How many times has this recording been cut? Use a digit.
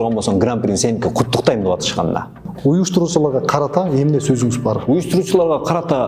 2